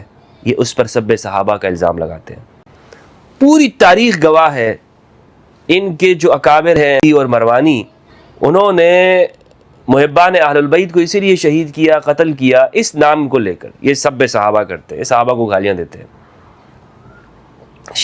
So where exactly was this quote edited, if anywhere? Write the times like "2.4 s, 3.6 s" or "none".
none